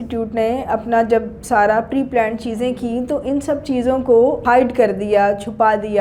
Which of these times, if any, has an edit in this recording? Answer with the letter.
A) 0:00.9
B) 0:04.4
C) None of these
B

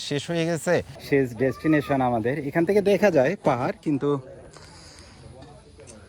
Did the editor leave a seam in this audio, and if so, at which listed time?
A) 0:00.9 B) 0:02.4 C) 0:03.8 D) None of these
A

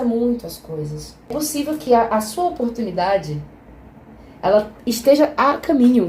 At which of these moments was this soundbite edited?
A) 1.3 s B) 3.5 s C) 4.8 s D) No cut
A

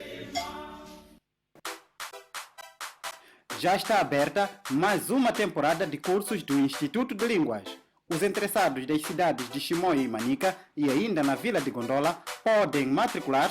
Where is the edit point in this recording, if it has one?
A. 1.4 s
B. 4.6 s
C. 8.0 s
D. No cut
A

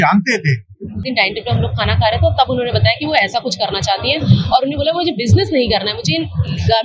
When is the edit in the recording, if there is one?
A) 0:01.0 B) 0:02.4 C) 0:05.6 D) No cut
A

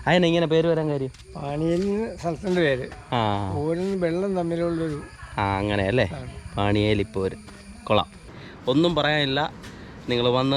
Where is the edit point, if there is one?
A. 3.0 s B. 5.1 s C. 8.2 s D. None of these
C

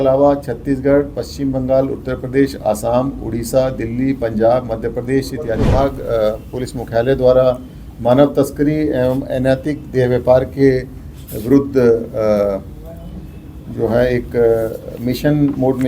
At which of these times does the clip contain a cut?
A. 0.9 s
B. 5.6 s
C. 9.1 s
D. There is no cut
B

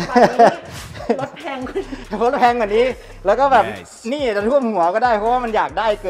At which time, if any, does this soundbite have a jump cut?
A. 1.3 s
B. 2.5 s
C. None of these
C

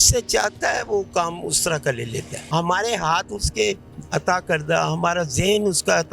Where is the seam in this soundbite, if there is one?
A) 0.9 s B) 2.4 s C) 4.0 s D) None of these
B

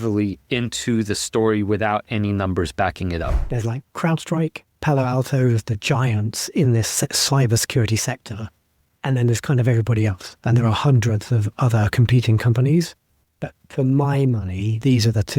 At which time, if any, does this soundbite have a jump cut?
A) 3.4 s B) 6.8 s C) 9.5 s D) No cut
A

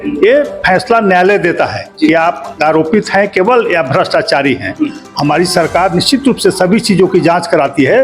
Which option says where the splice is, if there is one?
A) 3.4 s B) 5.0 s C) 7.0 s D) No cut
B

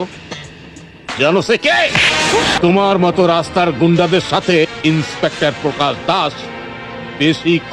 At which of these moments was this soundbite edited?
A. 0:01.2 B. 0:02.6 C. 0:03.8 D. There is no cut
B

